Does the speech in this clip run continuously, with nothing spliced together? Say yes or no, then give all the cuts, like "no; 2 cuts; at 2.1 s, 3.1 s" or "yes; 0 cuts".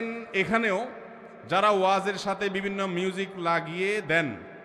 yes; 0 cuts